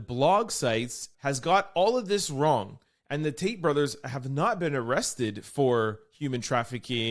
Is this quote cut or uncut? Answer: cut